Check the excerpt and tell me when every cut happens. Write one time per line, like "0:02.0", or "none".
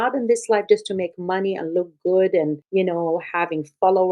0:02.6